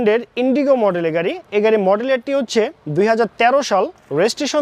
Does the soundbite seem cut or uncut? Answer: uncut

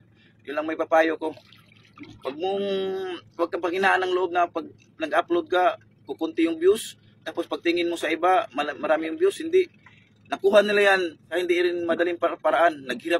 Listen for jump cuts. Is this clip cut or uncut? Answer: cut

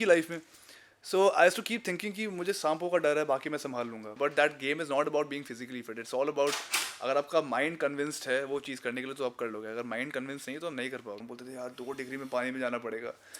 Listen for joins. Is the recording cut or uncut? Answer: cut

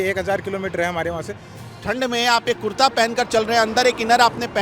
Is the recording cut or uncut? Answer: cut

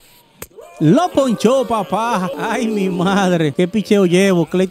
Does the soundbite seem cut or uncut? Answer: cut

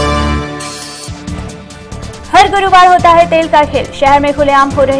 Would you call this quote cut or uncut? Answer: uncut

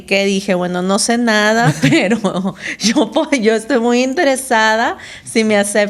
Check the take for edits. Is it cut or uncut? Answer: uncut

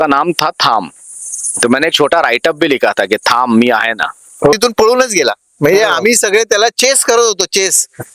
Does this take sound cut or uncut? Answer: cut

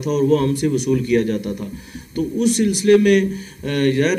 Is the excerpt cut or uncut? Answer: uncut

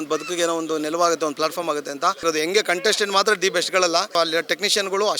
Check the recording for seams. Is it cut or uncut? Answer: cut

